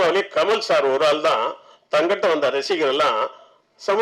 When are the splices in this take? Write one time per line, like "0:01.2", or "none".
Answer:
none